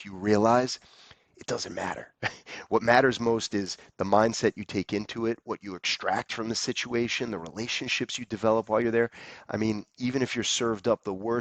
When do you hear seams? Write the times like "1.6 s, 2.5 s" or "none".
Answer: none